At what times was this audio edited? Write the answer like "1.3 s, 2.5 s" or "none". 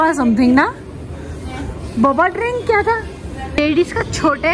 3.5 s